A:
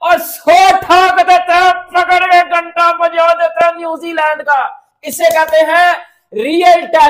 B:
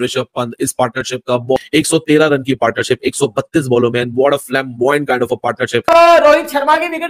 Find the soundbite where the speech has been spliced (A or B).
B